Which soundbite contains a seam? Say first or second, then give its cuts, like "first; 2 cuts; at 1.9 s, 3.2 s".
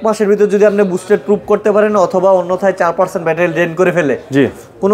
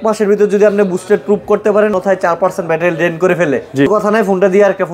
second; 2 cuts; at 1.9 s, 3.9 s